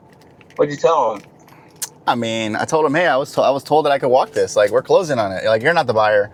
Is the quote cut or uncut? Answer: uncut